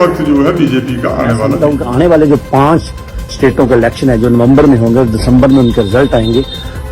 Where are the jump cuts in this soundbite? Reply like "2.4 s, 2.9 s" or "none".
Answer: 1.5 s